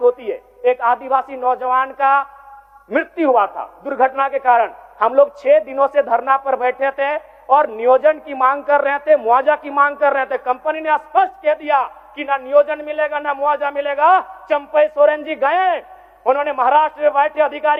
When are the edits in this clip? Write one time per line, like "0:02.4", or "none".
none